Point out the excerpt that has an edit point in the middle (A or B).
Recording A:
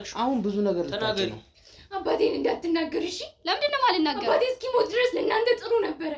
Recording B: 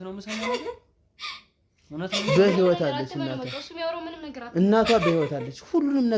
A